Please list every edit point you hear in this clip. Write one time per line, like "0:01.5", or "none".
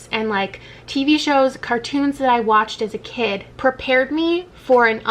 0:03.5